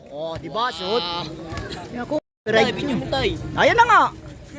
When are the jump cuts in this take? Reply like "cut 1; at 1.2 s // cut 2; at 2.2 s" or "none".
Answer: cut 1; at 2.3 s